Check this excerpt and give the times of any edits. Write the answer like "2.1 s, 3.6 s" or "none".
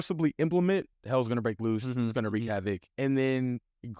1.0 s, 2.9 s